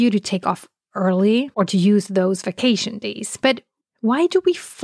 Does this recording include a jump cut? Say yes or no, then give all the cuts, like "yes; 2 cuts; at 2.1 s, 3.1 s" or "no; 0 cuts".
yes; 1 cut; at 1.5 s